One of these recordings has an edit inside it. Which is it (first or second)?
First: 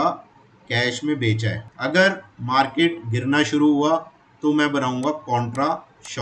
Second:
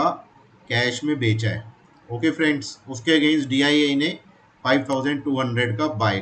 first